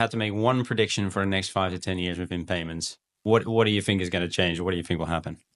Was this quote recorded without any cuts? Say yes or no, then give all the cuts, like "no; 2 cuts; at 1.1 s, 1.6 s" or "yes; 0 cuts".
yes; 0 cuts